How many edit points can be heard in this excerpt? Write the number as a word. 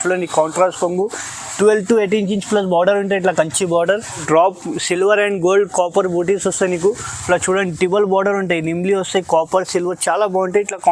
one